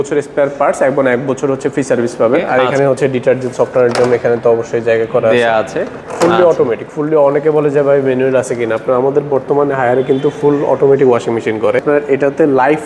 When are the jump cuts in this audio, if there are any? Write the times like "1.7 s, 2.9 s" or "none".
2.5 s, 11.8 s

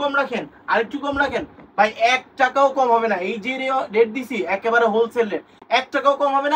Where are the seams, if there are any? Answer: none

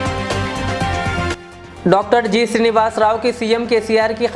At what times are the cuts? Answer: 1.5 s

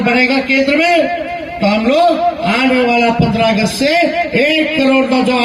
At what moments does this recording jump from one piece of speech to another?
none

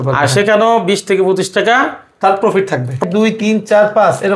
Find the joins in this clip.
3.0 s

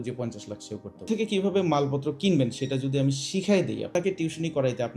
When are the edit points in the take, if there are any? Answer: 1.1 s, 3.9 s

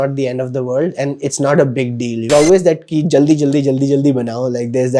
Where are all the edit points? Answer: 2.3 s

